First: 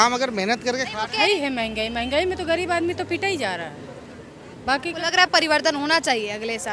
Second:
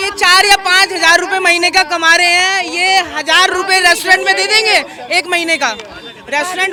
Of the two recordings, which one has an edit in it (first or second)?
first